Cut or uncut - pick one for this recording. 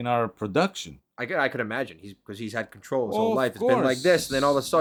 uncut